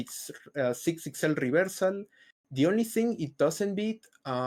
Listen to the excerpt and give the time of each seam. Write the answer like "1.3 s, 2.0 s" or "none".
none